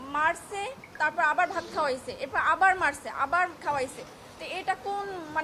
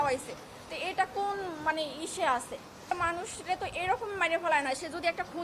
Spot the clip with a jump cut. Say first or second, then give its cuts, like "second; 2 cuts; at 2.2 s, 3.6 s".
second; 1 cut; at 2.8 s